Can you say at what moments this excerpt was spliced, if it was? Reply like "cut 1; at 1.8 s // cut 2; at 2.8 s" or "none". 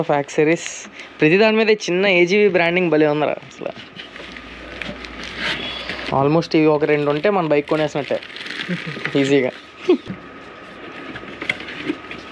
cut 1; at 6.0 s // cut 2; at 10.1 s